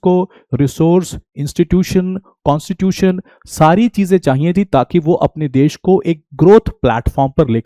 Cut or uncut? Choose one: uncut